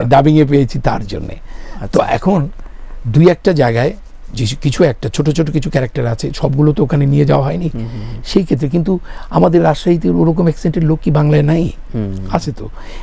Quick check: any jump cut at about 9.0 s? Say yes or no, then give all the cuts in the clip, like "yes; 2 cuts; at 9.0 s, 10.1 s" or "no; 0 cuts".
no; 0 cuts